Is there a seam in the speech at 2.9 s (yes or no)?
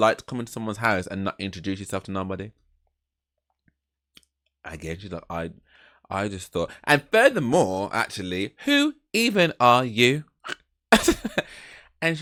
no